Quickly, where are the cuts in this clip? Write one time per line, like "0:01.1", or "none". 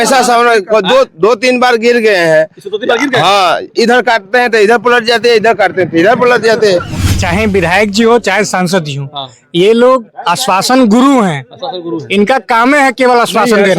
0:07.1